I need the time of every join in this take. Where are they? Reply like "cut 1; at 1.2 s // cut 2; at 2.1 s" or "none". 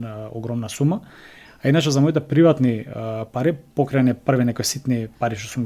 none